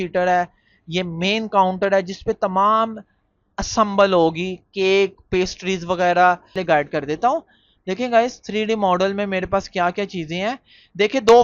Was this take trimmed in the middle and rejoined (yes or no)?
yes